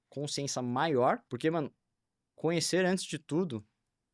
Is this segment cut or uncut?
cut